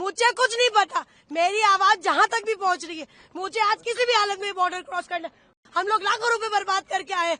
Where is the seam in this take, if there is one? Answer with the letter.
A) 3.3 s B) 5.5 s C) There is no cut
B